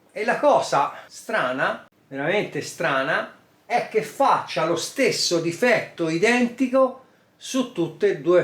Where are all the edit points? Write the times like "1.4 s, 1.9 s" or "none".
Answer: 1.1 s, 2.0 s